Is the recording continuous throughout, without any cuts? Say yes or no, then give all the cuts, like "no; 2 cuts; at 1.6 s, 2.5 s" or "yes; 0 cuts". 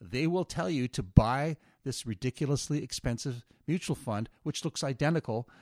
yes; 0 cuts